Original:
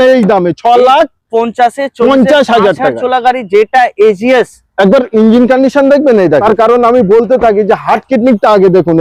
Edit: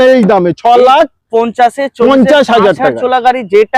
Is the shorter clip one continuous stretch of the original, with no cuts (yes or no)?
yes